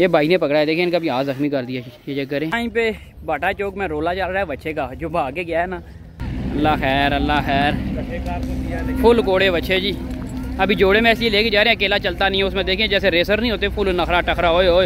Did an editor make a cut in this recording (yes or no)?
yes